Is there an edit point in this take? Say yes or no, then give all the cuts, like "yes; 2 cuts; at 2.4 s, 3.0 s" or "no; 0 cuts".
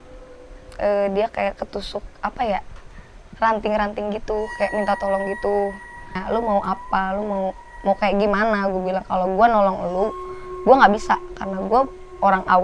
yes; 1 cut; at 6.2 s